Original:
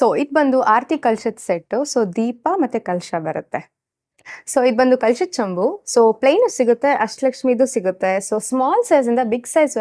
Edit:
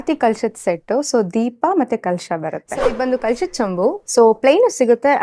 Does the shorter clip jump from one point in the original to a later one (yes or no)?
yes